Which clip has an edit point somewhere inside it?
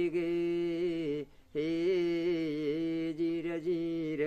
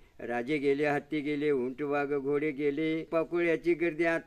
second; 1 cut; at 3.1 s

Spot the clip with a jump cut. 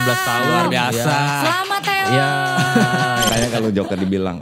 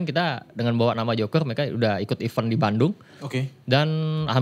first; 1 cut; at 3.3 s

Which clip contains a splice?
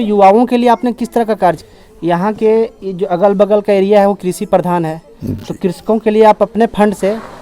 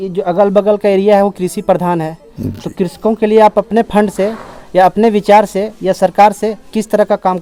first; 1 cut; at 1.7 s

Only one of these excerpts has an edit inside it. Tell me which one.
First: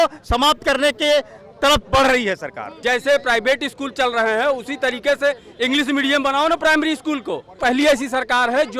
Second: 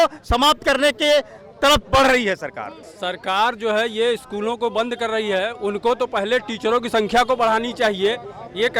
first; 2 cuts; at 2.8 s, 7.6 s

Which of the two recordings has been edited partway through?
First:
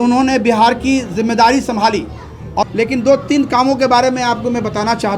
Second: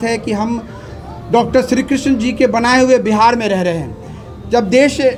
first; 1 cut; at 2.6 s

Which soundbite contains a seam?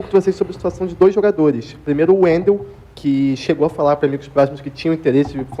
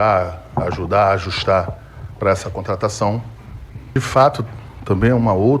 second; 1 cut; at 3.9 s

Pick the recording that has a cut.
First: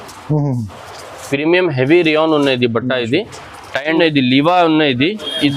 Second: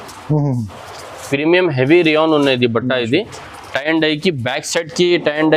first; 1 cut; at 4.0 s

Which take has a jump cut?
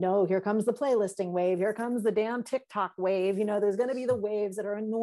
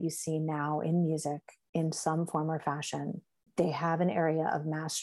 second; 1 cut; at 3.5 s

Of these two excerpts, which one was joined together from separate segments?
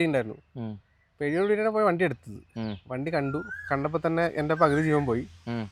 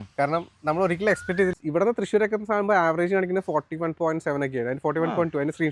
second; 1 cut; at 1.5 s

